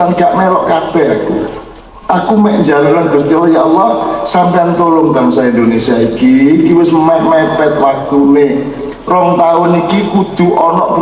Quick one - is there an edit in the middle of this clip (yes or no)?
no